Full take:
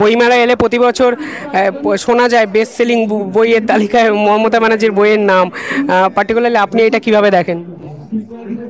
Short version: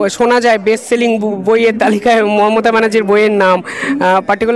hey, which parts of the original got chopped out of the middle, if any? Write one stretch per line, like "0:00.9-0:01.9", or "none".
none